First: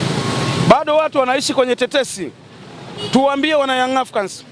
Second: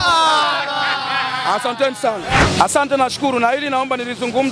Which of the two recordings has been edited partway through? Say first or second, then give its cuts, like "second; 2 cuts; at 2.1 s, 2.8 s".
second; 1 cut; at 2.4 s